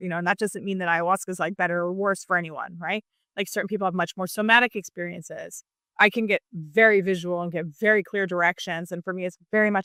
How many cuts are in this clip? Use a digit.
0